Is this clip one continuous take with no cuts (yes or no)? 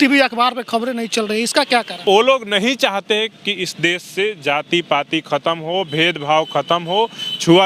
no